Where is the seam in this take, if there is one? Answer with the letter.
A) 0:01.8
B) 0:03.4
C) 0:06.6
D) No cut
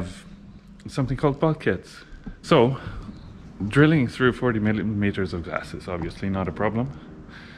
A